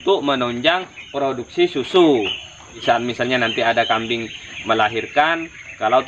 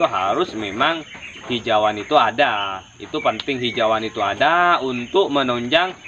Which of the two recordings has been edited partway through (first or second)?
first